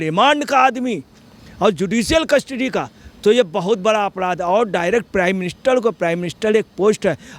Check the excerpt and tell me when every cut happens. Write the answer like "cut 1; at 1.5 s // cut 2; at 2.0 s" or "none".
none